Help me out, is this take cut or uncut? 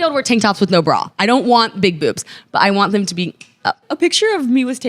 cut